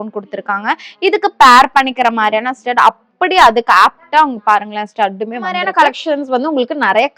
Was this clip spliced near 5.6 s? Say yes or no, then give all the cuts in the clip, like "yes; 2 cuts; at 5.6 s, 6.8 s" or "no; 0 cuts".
yes; 1 cut; at 5.6 s